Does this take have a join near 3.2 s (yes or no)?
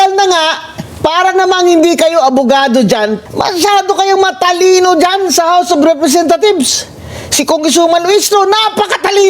yes